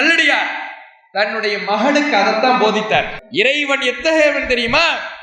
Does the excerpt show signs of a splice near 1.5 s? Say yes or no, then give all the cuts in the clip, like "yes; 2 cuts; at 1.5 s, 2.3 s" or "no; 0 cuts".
no; 1 cut; at 3.2 s